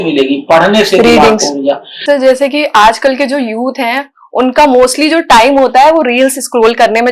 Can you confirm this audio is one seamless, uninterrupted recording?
no; 1 cut; at 1.9 s

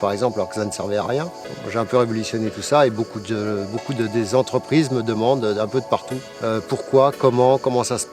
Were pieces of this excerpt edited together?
no; 0 cuts

